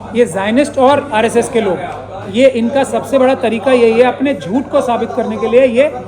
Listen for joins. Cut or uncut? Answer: uncut